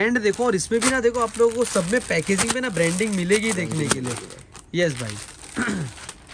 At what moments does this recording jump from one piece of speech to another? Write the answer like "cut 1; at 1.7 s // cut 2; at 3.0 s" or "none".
none